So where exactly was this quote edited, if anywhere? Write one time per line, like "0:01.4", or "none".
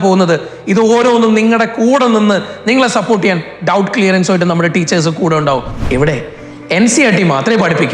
0:05.7